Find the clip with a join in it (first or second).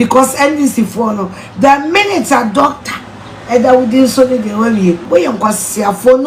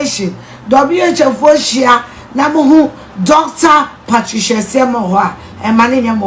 first